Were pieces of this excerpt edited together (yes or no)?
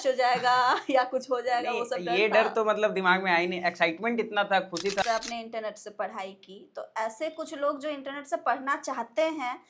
yes